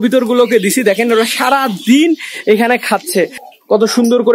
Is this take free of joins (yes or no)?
no